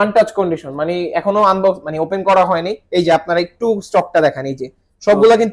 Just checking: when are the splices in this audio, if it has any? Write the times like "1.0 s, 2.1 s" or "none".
2.8 s